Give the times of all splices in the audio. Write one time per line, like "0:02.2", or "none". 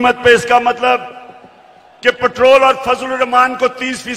none